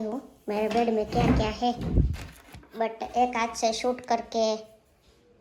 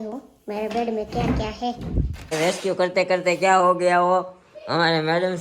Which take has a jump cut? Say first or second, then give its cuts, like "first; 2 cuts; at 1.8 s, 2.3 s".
second; 1 cut; at 2.3 s